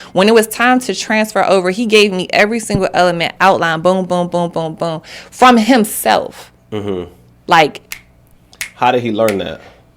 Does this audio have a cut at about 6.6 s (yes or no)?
no